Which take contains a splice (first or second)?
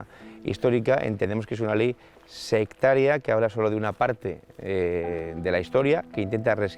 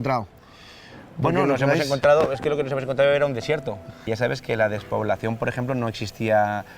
second